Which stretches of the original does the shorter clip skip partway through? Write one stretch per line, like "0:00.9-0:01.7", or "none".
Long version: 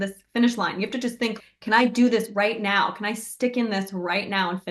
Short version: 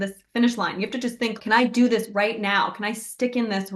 0:01.4-0:01.6